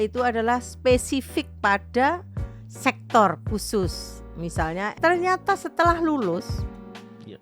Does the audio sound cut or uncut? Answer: cut